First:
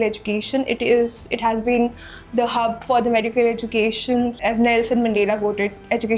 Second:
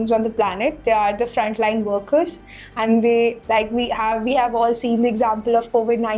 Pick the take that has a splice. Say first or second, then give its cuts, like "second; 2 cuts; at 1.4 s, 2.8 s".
first; 1 cut; at 4.4 s